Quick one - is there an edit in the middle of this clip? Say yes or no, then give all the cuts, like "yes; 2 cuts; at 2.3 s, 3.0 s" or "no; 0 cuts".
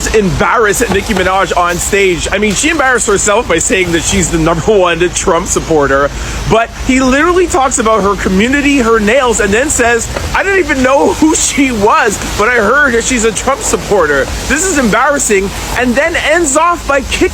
no; 0 cuts